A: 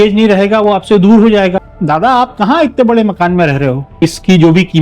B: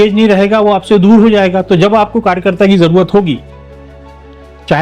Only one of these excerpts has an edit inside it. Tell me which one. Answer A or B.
A